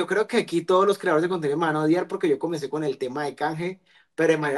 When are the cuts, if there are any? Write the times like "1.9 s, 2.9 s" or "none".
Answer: none